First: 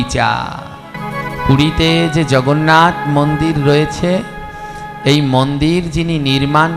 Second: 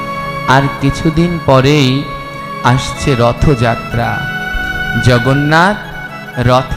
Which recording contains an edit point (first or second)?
first